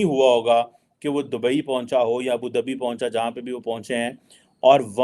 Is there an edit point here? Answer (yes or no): no